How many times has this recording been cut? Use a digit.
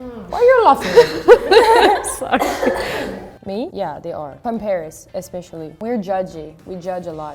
0